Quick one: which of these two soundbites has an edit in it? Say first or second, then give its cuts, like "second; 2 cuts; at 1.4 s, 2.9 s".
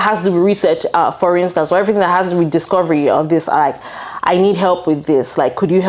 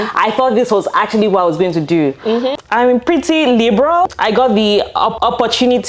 second; 3 cuts; at 2.6 s, 4.1 s, 5.2 s